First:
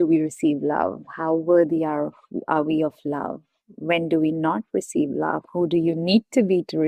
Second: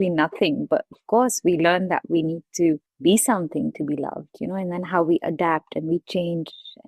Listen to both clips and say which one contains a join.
second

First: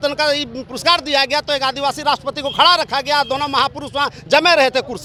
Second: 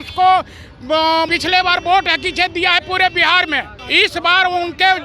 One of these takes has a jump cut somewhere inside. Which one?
second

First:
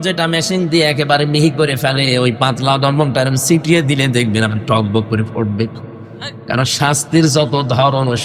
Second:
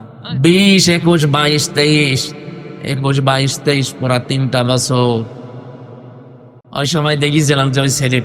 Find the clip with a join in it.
second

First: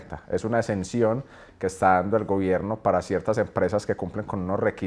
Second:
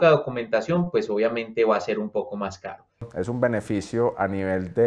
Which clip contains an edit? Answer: second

